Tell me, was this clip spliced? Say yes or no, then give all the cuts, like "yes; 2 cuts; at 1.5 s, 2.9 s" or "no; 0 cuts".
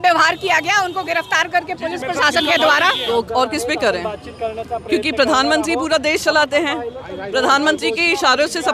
yes; 1 cut; at 3.0 s